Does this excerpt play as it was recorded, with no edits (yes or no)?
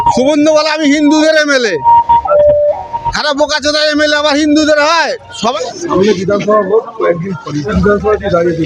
no